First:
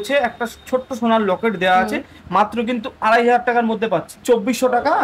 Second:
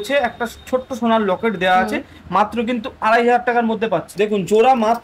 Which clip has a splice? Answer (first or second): second